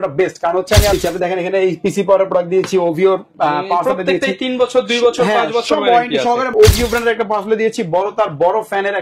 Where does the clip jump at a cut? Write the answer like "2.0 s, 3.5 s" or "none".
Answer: 0.9 s, 6.5 s